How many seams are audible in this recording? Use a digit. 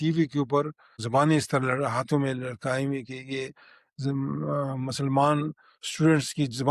1